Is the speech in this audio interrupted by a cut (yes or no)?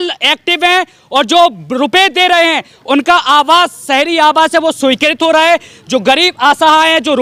no